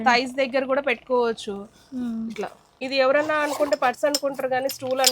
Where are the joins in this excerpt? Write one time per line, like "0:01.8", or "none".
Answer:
0:02.8

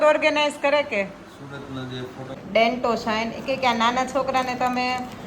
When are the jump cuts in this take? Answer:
0:02.4

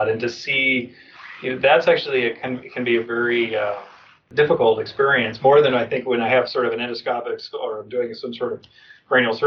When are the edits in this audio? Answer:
0:04.3

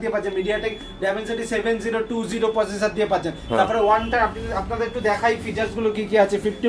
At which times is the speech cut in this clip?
none

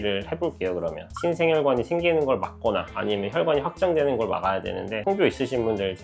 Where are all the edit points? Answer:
0:01.1
0:04.9

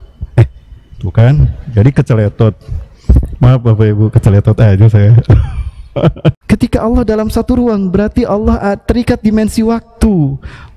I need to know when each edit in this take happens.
0:06.4

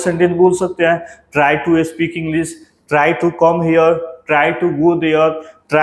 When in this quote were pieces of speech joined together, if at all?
none

